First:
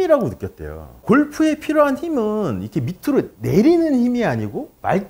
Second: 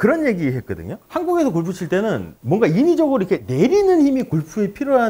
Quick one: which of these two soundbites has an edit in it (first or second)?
first